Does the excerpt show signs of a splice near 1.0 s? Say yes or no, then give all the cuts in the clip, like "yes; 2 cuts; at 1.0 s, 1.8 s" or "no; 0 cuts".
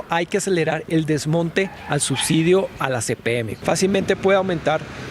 no; 1 cut; at 3.5 s